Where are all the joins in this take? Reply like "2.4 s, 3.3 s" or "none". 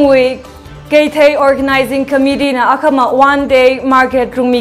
none